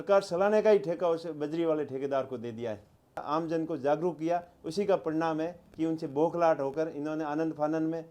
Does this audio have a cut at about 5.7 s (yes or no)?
no